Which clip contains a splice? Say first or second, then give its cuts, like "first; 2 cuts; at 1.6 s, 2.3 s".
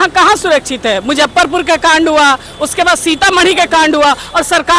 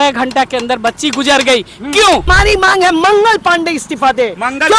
second; 1 cut; at 2.3 s